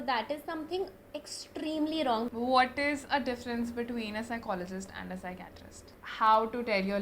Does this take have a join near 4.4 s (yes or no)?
no